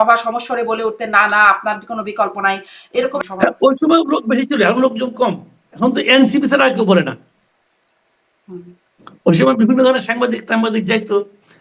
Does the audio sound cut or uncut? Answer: cut